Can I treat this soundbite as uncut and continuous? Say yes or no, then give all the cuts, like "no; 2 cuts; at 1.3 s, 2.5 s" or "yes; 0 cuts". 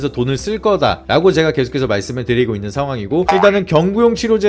no; 1 cut; at 3.2 s